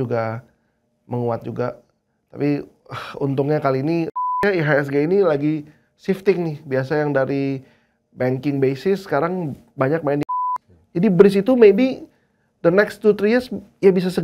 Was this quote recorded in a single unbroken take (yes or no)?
no